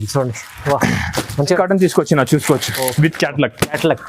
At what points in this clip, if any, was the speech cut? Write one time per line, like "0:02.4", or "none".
0:01.6